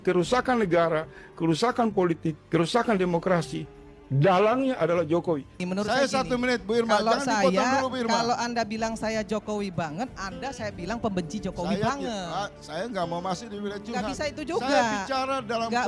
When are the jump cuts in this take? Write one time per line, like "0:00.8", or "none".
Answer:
0:05.6

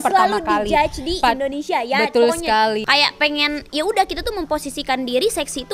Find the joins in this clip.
0:02.8

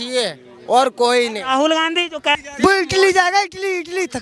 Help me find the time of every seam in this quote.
0:02.4

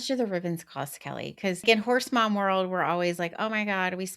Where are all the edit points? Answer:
0:01.6

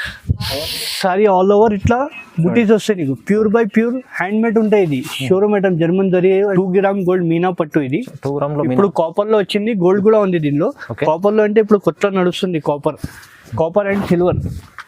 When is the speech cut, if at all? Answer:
0:06.5

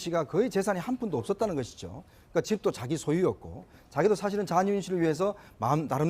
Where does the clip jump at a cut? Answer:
0:04.1

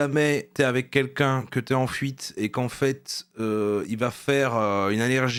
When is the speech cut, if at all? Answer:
none

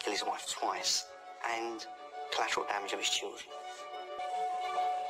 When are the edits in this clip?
0:04.2

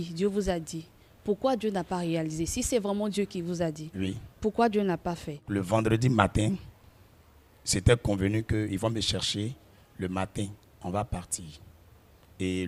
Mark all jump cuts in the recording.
none

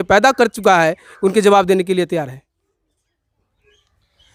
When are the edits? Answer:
none

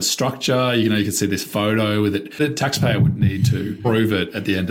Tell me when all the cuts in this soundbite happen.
0:02.3
0:03.8

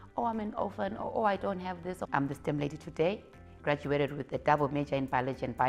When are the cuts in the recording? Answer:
0:02.0

